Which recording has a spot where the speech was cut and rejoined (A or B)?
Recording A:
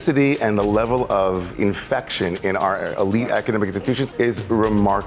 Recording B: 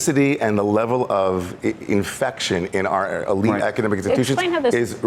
A